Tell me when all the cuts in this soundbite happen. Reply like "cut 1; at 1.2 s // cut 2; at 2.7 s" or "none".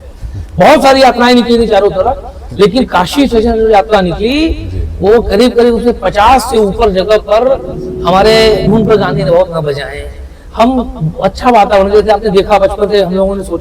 cut 1; at 8.7 s

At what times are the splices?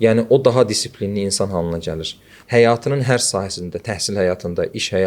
cut 1; at 2.3 s

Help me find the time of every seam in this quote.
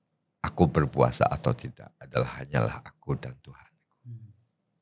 none

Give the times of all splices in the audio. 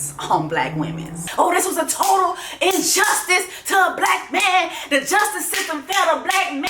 cut 1; at 1.2 s

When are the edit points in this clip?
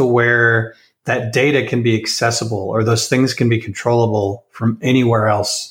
none

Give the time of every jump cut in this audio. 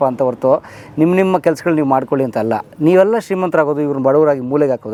none

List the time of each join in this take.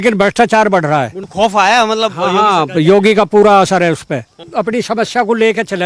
cut 1; at 1.2 s

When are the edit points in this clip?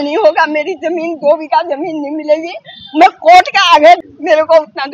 cut 1; at 3.9 s

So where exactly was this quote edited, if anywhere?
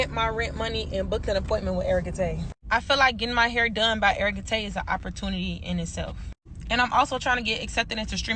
none

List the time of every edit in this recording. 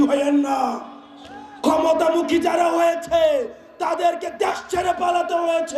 none

